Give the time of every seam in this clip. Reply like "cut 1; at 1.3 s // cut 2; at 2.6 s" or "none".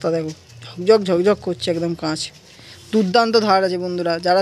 none